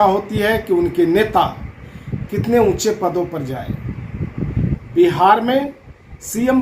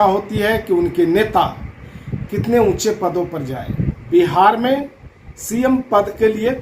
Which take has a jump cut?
second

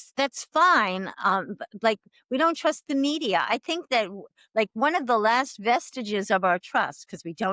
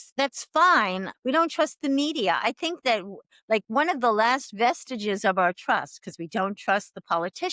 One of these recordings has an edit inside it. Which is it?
second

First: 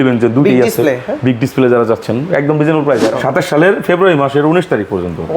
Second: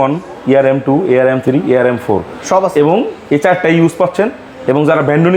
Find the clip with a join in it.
first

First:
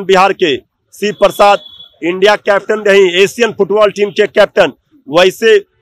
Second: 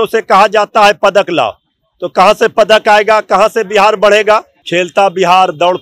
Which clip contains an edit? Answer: second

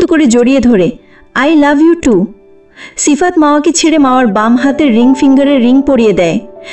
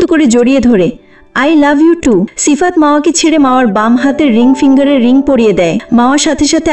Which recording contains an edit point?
second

